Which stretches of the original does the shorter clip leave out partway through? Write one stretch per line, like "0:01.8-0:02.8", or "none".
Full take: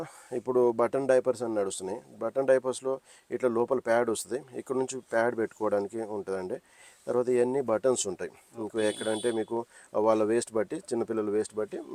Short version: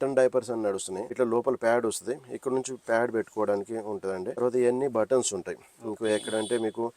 0:01.9-0:03.2
0:06.6-0:07.1